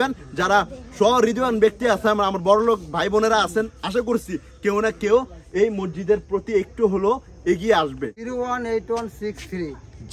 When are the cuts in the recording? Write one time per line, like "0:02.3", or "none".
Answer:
0:08.1